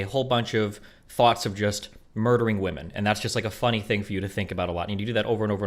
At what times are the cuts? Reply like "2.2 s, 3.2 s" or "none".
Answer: none